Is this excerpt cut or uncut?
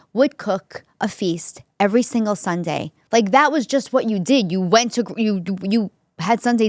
cut